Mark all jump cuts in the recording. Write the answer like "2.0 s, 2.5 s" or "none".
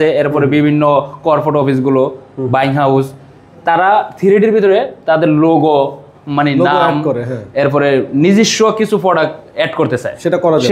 none